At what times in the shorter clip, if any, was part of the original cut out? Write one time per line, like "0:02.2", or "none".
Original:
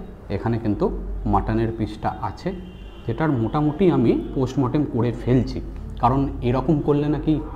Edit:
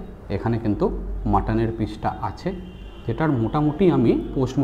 none